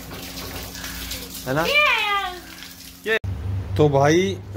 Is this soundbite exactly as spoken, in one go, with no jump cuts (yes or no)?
no